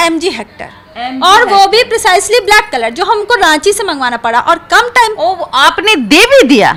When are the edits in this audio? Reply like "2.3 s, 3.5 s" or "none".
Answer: none